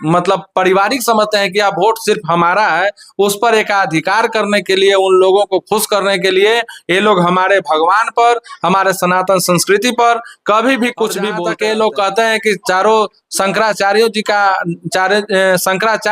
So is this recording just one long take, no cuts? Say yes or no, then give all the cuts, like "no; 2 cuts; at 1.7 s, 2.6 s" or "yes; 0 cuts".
no; 1 cut; at 11.4 s